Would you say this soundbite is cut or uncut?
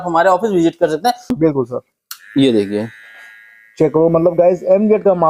cut